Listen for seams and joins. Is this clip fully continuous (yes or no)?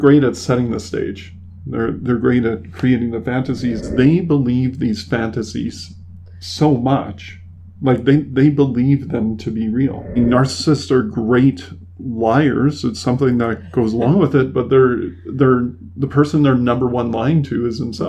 no